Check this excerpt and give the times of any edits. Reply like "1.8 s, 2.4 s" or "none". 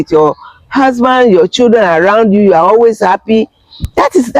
none